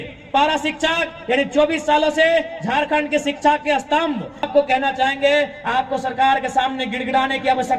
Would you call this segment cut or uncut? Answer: cut